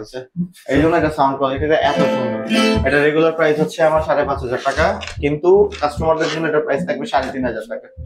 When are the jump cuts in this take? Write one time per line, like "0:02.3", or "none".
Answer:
none